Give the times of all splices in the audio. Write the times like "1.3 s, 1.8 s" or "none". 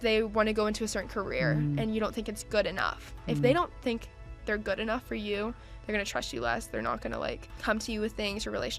7.5 s

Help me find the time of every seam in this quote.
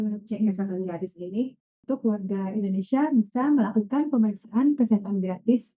1.8 s

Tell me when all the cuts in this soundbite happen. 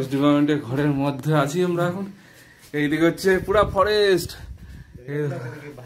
none

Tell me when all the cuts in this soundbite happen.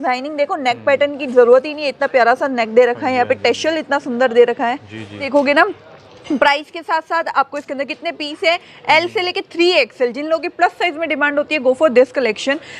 5.2 s

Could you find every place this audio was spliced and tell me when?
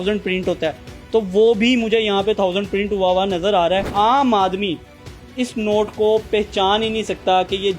3.9 s

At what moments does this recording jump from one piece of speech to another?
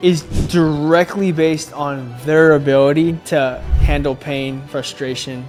none

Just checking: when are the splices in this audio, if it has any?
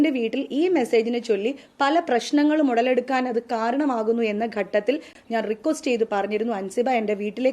5.1 s

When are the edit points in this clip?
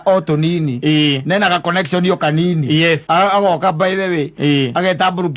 3.0 s

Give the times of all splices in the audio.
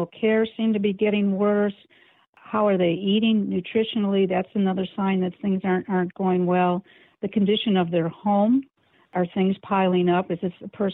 9.0 s

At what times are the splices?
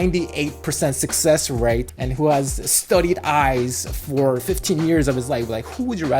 2.0 s, 4.4 s

